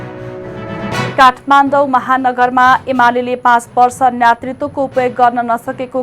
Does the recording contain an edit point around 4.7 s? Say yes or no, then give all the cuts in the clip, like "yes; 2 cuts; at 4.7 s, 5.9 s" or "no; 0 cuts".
no; 1 cut; at 1.1 s